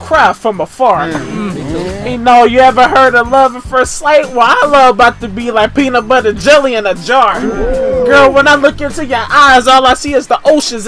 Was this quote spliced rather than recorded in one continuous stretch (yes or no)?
no